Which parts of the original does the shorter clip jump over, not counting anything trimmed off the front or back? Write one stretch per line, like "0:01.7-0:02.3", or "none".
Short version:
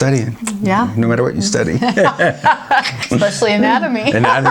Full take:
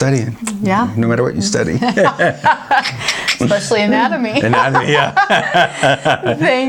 0:03.0-0:03.2